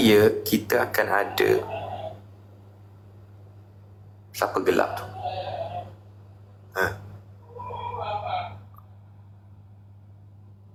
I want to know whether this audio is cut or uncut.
uncut